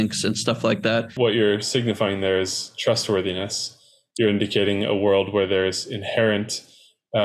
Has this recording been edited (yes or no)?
yes